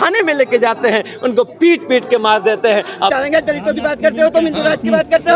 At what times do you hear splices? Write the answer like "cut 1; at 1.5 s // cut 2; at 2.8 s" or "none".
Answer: cut 1; at 3.1 s